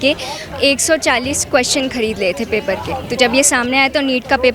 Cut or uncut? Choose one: uncut